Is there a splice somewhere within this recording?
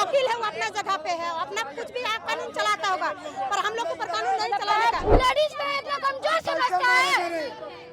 yes; 1 cut; at 5.1 s

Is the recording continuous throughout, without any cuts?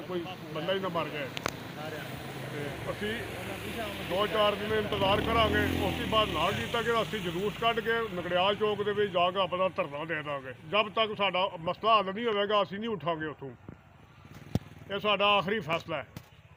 yes; 0 cuts

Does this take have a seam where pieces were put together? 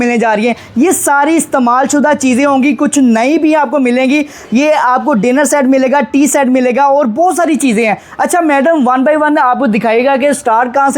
no; 0 cuts

